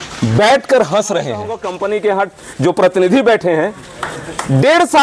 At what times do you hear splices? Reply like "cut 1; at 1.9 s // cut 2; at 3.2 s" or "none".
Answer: cut 1; at 1.6 s